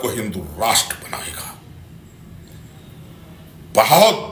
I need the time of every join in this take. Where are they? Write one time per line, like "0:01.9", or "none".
none